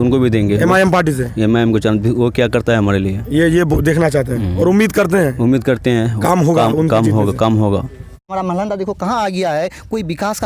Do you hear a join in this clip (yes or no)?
yes